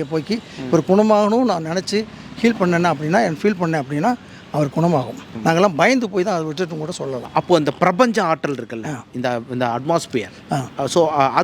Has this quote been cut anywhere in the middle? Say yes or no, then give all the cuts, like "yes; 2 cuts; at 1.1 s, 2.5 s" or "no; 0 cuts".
yes; 2 cuts; at 5.2 s, 7.3 s